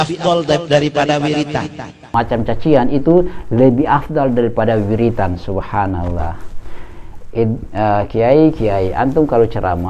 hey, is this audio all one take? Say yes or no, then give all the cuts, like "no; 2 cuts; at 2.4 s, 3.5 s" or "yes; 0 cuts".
no; 1 cut; at 2.1 s